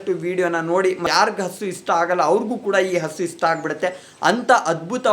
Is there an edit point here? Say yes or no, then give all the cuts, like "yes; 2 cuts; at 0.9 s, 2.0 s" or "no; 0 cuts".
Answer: yes; 1 cut; at 1.1 s